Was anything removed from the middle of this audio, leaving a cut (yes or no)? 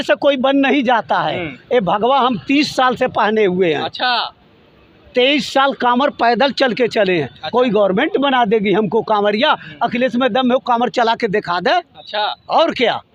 no